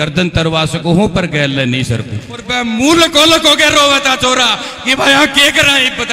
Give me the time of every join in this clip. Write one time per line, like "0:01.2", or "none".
0:02.5